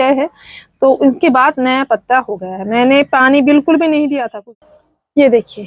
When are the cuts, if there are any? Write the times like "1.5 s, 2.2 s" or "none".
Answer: 4.3 s